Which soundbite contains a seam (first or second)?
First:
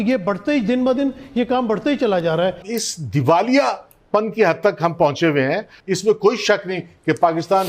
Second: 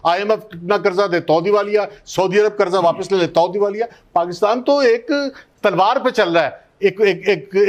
first